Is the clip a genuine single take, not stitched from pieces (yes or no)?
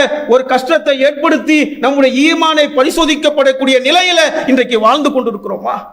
yes